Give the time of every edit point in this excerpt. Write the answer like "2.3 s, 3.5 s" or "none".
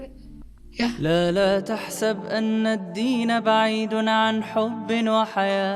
1.0 s